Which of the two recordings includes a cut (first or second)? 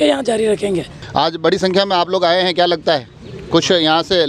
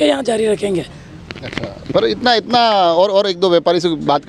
first